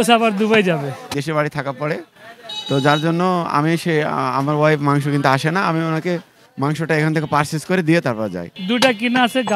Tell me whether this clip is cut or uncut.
cut